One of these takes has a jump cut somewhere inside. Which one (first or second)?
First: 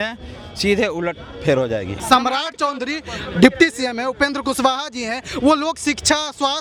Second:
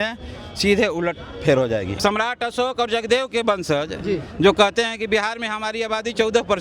second